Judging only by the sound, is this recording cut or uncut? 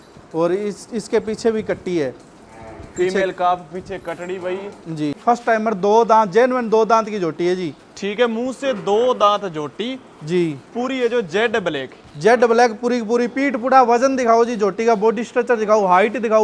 cut